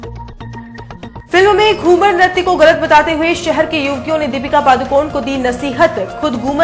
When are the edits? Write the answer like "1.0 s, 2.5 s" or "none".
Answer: none

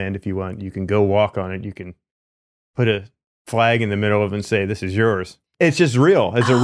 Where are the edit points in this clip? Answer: 5.4 s

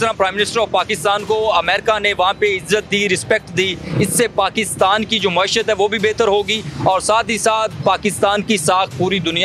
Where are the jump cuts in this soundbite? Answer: none

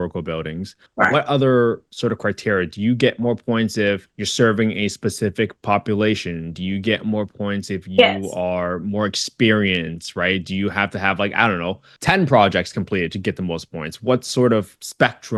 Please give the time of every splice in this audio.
none

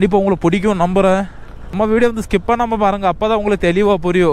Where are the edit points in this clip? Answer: 1.7 s

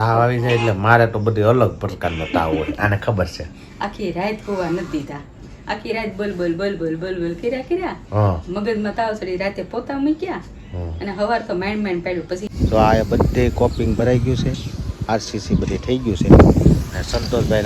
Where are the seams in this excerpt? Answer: 12.4 s

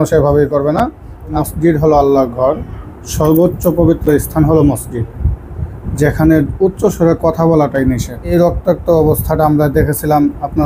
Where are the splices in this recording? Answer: 1.4 s, 8.3 s

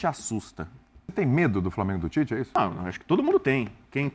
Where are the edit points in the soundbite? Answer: 1.1 s, 2.5 s

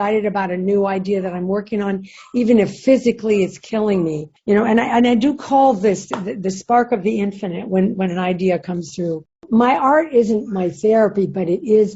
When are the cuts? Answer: 4.3 s, 9.4 s

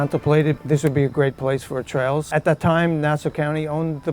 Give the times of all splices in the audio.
2.3 s

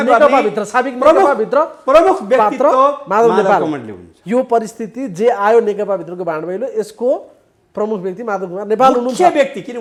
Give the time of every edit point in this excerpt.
none

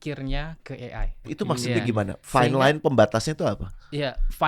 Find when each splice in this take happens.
1.3 s

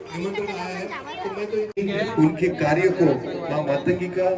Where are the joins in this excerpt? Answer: 1.7 s

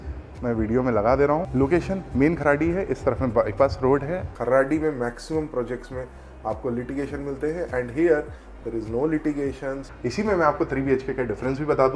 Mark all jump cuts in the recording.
1.5 s, 4.3 s, 9.8 s

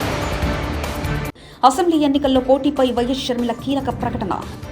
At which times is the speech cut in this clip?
1.2 s

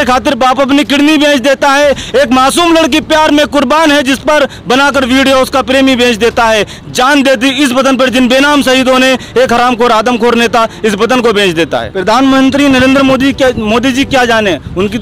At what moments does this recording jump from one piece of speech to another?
11.9 s

